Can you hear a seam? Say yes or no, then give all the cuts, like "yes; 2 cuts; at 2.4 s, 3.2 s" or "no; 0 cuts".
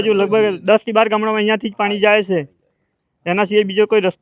no; 0 cuts